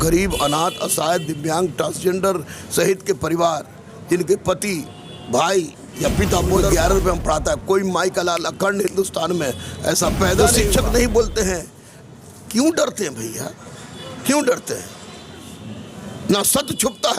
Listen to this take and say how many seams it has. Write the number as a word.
two